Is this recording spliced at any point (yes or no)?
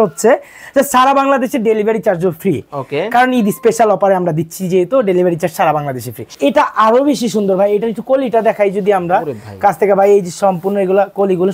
yes